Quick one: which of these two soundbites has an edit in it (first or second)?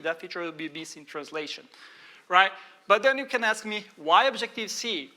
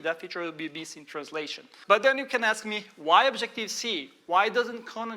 second